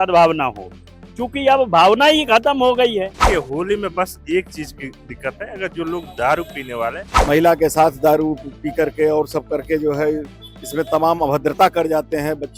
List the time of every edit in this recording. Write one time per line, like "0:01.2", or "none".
0:03.2
0:07.1

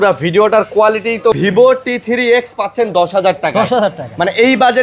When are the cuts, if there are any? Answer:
0:01.4

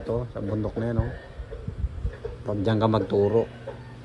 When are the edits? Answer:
none

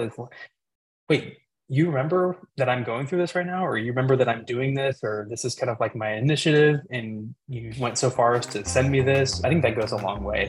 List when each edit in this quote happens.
0:09.4

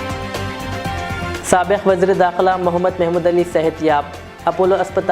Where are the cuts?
0:01.4

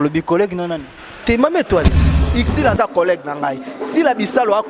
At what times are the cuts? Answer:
0:02.2

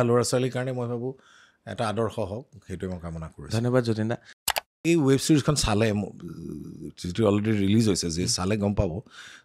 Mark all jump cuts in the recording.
0:04.6

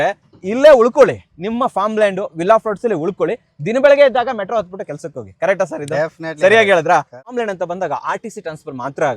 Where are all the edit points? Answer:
0:07.2

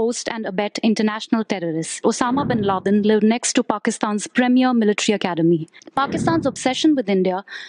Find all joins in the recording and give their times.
0:02.0
0:05.8

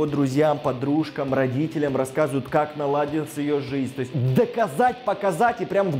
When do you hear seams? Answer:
0:04.1

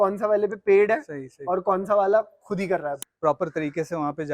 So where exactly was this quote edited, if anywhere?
0:03.0

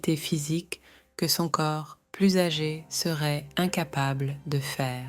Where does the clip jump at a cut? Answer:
none

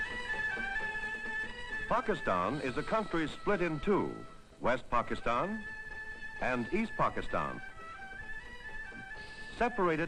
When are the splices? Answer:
0:05.9

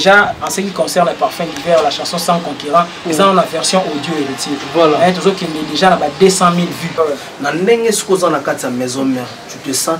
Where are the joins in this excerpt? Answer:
0:07.0

